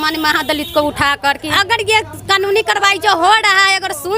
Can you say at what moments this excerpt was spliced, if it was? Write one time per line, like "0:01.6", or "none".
0:01.5